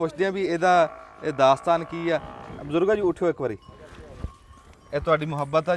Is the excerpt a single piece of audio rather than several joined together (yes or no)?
yes